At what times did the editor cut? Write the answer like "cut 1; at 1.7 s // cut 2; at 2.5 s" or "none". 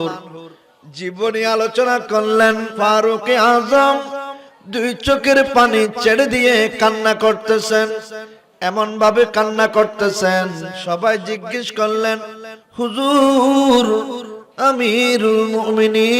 cut 1; at 2.7 s // cut 2; at 10.7 s